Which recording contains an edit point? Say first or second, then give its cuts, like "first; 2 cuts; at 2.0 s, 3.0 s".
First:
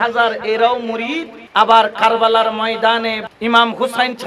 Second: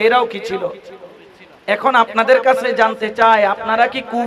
first; 2 cuts; at 1.4 s, 3.2 s